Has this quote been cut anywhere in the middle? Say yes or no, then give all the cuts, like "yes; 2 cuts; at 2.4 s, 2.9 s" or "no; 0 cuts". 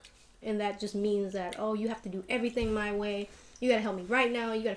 no; 0 cuts